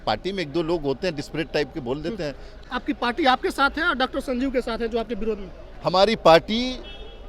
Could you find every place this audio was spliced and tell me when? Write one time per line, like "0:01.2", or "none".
0:02.5